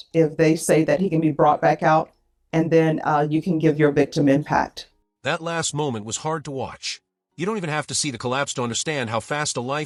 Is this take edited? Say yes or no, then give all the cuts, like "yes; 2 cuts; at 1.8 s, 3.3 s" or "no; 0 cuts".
no; 0 cuts